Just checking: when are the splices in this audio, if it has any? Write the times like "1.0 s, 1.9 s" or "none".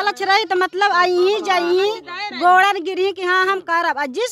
none